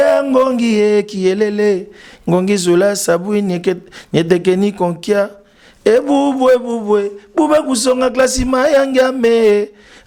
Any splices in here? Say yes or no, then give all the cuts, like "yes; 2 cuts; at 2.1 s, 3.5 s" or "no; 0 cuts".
no; 0 cuts